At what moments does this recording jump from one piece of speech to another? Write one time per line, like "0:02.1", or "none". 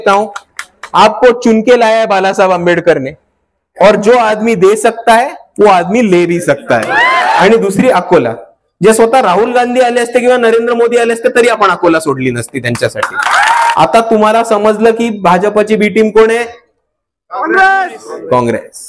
0:07.4
0:13.7

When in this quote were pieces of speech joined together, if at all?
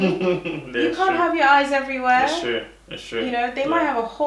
none

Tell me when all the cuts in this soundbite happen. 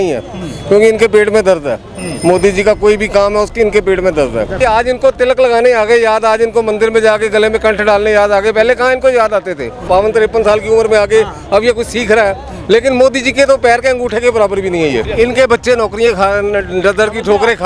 0:04.5
0:09.8
0:15.0

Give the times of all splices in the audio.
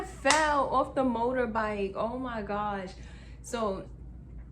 0:03.1

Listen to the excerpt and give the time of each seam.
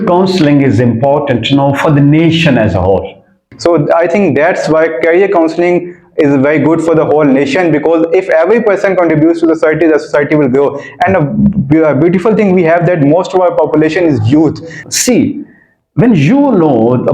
0:03.4
0:14.7

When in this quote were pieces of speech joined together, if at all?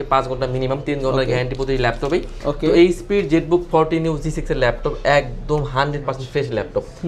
none

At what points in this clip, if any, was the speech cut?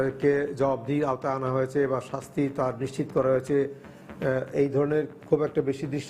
none

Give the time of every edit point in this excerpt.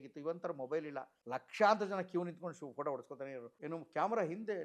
0:01.1
0:03.5

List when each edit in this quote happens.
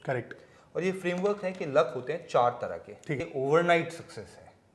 0:03.2

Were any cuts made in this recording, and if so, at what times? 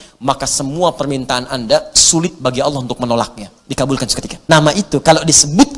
0:04.3

